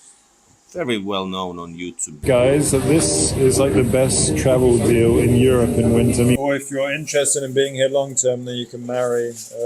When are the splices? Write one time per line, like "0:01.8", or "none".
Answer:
0:02.1
0:06.4

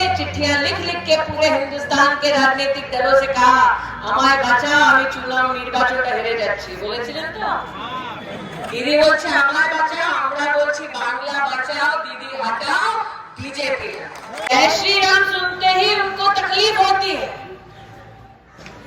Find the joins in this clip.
0:14.5

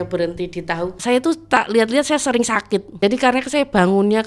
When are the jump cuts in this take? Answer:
0:01.0
0:03.0

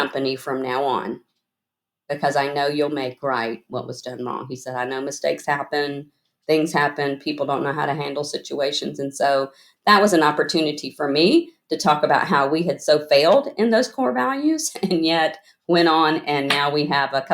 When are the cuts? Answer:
none

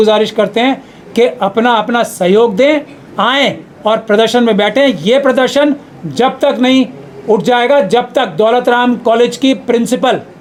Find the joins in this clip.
none

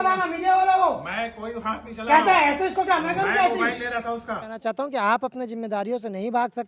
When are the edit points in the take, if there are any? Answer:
0:04.5

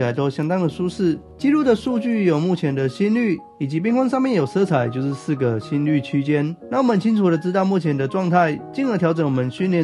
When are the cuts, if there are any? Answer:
none

